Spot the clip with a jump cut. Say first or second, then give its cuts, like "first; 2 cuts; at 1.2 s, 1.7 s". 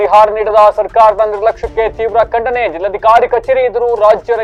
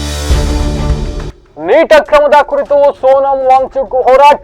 second; 1 cut; at 1.3 s